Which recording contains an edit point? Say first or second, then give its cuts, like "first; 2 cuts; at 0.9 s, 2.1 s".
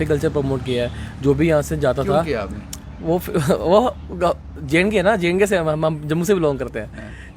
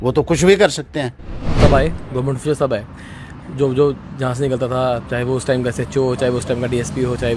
second; 1 cut; at 1.4 s